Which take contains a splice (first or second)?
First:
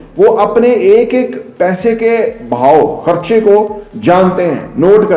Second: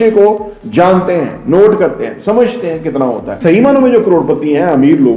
second